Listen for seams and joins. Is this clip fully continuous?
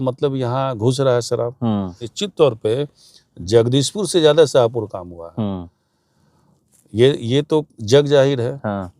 no; 1 cut; at 2.1 s

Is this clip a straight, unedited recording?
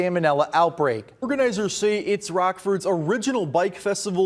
no; 1 cut; at 1.2 s

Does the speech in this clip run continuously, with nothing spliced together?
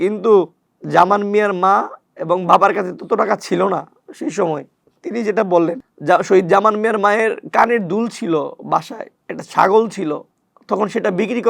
no; 1 cut; at 10.3 s

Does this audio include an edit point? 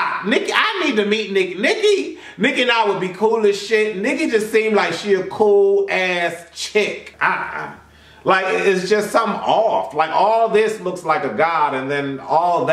yes; 1 cut; at 7.1 s

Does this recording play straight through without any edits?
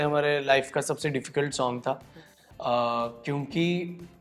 yes; 0 cuts

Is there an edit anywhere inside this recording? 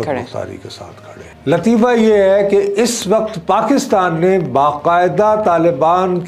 yes; 1 cut; at 1.2 s

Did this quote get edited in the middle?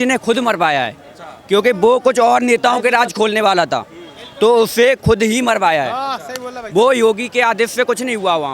no; 0 cuts

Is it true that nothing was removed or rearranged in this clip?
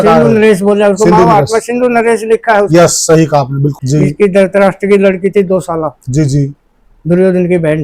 no; 1 cut; at 3.8 s

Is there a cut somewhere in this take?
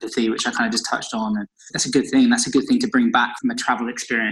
yes; 1 cut; at 3.3 s

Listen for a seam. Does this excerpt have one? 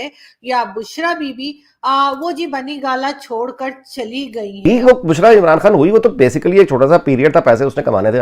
yes; 1 cut; at 4.6 s

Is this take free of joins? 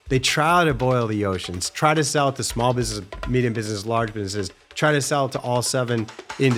yes; 0 cuts

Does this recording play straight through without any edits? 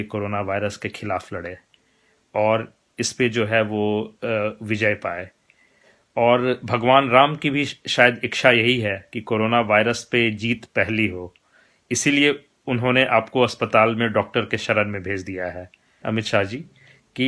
no; 1 cut; at 16.0 s

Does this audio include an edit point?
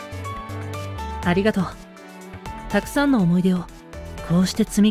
yes; 1 cut; at 1.2 s

